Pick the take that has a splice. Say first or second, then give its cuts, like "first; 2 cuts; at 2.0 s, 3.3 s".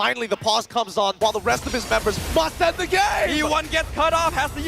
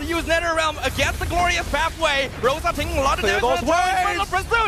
first; 1 cut; at 1.2 s